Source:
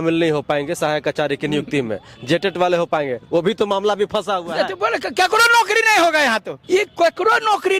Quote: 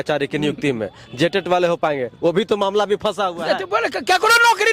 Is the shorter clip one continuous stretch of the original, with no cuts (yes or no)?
yes